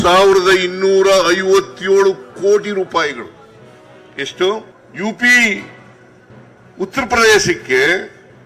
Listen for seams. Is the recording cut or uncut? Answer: cut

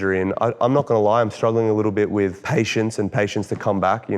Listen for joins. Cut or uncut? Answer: cut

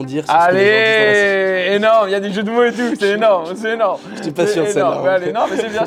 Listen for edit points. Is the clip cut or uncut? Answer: uncut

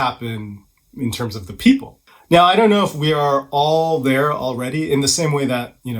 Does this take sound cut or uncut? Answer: cut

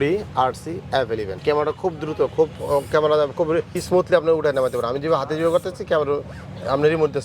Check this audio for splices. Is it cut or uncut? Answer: cut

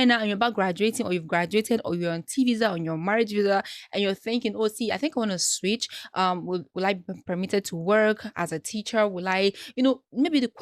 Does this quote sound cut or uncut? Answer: uncut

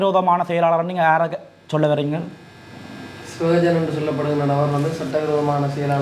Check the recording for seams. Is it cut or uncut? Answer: uncut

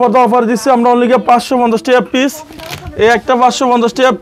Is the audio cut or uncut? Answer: uncut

